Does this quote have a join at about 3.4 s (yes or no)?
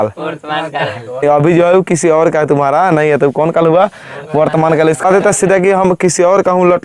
no